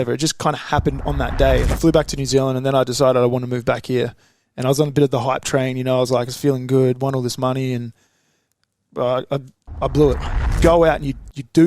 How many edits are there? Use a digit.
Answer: 2